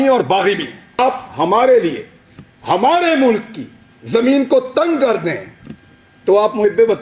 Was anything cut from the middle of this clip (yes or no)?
yes